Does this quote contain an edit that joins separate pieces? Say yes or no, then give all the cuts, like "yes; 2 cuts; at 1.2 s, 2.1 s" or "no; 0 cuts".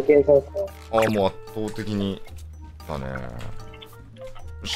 no; 0 cuts